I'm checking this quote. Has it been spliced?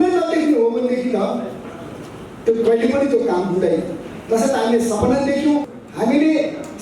yes; 1 cut; at 5.8 s

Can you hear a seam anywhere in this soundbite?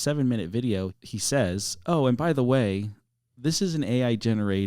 no; 0 cuts

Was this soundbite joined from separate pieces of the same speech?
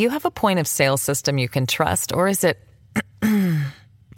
no; 0 cuts

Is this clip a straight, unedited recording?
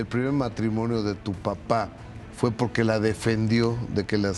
no; 1 cut; at 2.2 s

